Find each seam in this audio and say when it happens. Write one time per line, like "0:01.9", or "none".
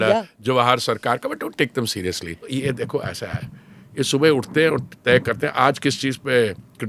0:02.5